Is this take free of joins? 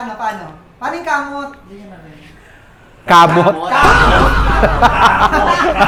yes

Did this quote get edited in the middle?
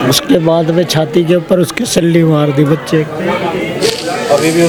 no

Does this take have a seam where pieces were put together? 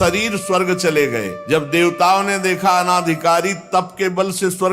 yes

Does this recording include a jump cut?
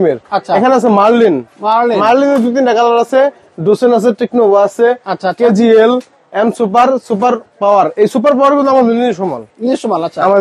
no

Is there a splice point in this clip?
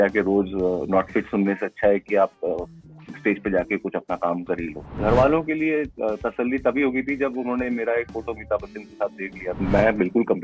yes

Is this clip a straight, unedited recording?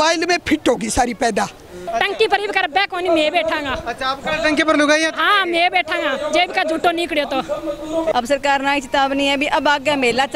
no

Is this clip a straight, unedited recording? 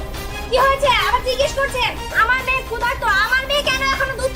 yes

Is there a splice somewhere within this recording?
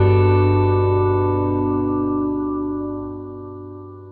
no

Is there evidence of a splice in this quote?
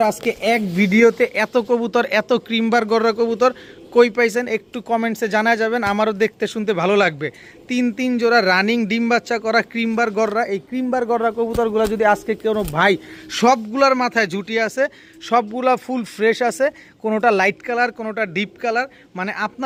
no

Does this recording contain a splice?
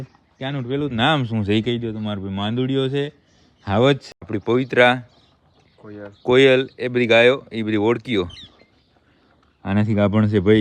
yes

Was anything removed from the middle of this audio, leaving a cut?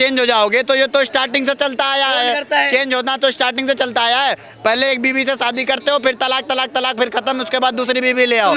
no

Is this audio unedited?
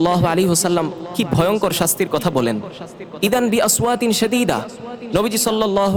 yes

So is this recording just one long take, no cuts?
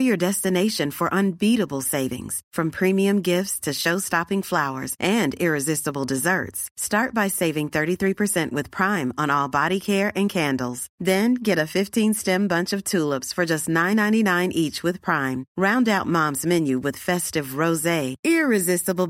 yes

